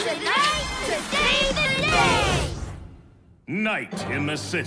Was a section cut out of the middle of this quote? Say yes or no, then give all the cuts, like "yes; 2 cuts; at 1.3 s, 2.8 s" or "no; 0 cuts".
no; 0 cuts